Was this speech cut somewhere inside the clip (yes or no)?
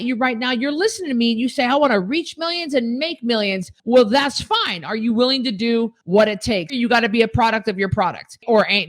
yes